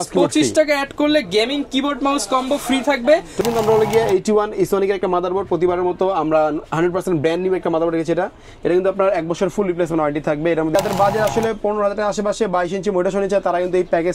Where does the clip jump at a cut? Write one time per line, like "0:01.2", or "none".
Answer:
0:03.4
0:10.8